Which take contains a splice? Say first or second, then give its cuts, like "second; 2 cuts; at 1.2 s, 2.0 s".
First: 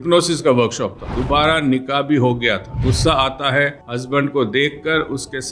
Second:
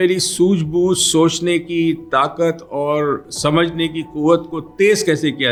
first; 3 cuts; at 1.2 s, 2.8 s, 3.9 s